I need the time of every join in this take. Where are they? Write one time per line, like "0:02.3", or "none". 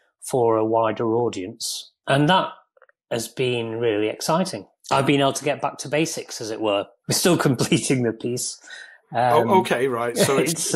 0:02.0
0:04.7
0:07.0